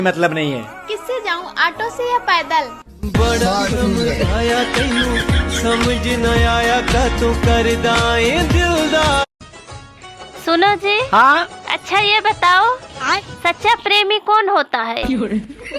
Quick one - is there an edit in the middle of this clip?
yes; 1 cut; at 9.4 s

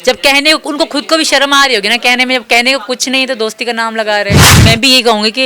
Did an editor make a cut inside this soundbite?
yes; 1 cut; at 4.6 s

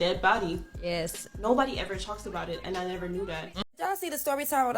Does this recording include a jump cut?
yes; 1 cut; at 3.7 s

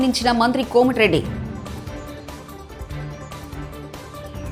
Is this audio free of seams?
yes; 0 cuts

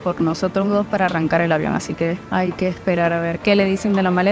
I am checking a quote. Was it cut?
yes; 2 cuts; at 2.2 s, 3.4 s

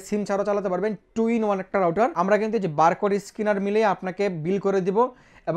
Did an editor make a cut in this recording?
yes; 1 cut; at 2.1 s

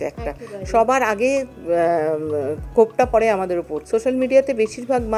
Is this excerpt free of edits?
no; 1 cut; at 3.7 s

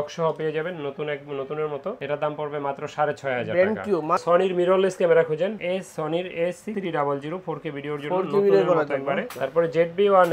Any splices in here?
yes; 2 cuts; at 4.2 s, 9.3 s

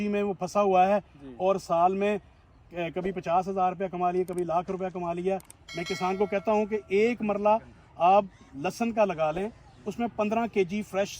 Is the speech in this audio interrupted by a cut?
yes; 1 cut; at 5.6 s

